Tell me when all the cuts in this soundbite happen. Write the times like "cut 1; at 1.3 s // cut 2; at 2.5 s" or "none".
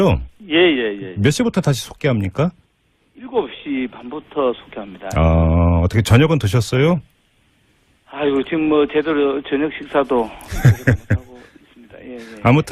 none